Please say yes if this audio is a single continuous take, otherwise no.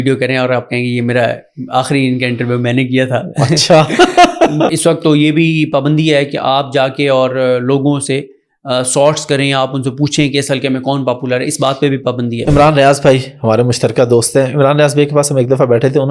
no